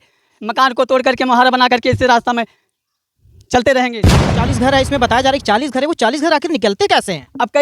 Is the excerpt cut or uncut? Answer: cut